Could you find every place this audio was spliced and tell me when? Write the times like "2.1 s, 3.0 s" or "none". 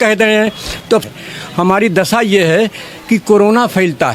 1.0 s

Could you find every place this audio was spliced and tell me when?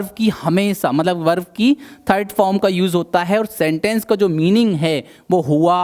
none

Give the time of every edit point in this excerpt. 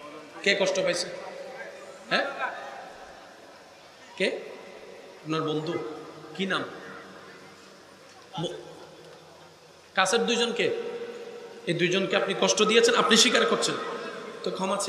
none

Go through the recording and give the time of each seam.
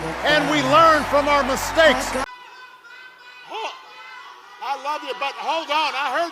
2.0 s

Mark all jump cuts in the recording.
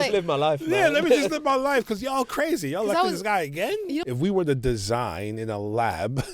4.0 s

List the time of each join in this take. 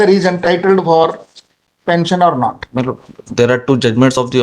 none

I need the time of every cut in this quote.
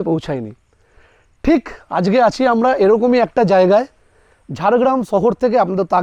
none

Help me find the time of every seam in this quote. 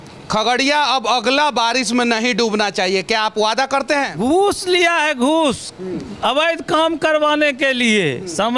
4.1 s

